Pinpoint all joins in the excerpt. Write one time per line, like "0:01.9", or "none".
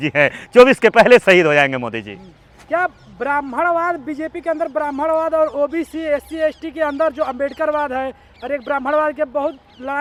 none